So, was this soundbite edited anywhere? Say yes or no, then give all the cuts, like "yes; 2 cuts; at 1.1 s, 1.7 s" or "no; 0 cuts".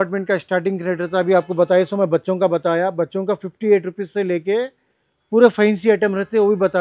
no; 0 cuts